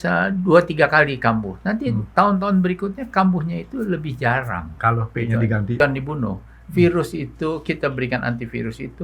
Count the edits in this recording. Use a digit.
1